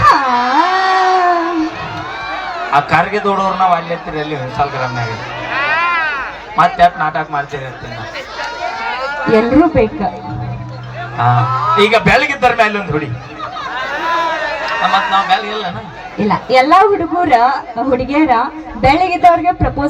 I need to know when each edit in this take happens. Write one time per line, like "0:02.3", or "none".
none